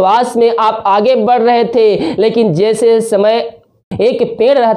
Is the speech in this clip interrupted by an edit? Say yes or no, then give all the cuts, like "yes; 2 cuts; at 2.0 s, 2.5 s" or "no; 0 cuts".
yes; 1 cut; at 3.8 s